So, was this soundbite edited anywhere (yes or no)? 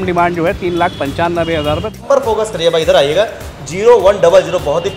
yes